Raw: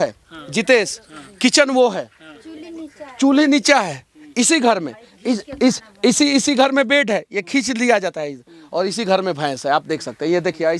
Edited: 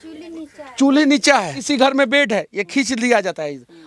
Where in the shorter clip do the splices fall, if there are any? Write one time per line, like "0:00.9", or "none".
0:01.7